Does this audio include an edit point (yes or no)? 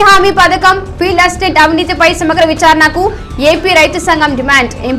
no